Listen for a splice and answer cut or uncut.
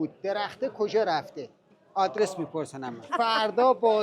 cut